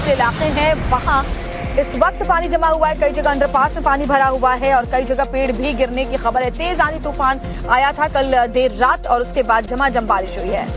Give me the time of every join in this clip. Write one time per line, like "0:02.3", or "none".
0:07.1